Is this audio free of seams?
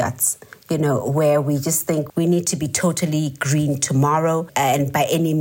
no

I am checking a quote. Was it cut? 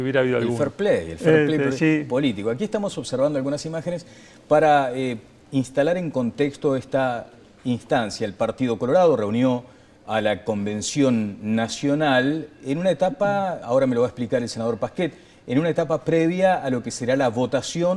yes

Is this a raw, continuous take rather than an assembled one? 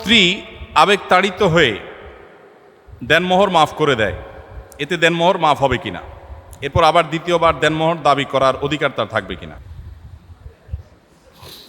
yes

